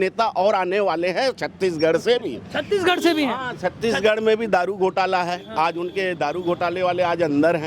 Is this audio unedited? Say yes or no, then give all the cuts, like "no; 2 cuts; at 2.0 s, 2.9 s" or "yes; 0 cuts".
yes; 0 cuts